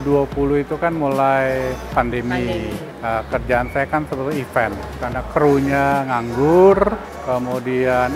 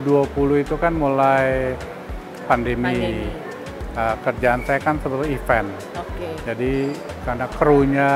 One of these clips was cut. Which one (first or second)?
first